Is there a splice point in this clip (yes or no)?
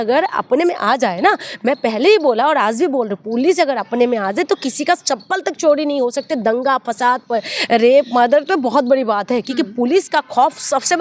no